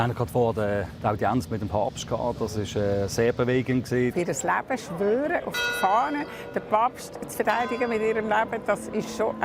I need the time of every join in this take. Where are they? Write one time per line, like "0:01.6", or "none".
0:04.1